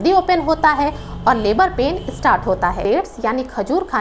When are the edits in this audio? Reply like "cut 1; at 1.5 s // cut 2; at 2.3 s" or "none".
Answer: cut 1; at 2.8 s